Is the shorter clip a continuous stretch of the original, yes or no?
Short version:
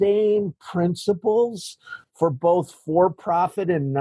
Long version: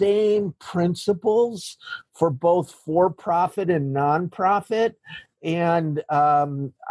yes